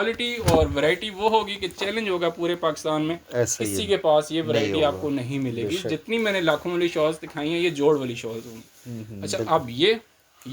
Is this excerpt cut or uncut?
uncut